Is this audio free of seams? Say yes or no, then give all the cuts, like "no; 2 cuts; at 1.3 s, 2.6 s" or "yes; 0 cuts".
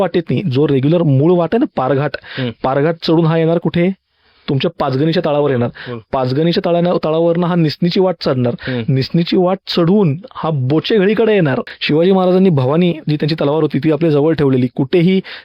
no; 1 cut; at 11.7 s